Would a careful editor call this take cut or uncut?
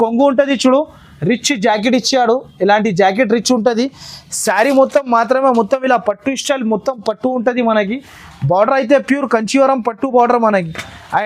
uncut